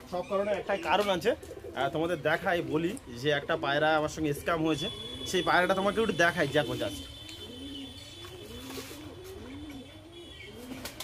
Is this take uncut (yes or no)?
yes